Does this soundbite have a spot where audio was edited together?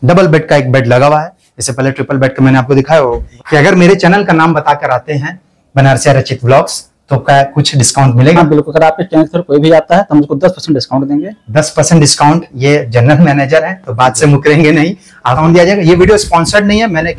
yes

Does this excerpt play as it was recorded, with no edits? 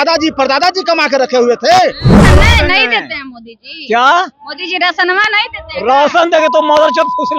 no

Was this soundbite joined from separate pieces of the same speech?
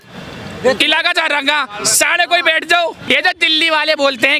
yes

